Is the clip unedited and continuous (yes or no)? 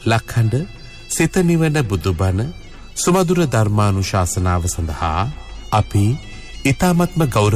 yes